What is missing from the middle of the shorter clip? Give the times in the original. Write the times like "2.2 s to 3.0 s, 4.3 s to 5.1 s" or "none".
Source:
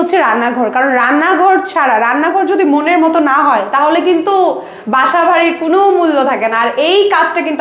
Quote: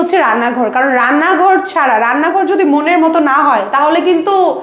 none